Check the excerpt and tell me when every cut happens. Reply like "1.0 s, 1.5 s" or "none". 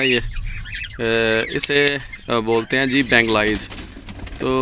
none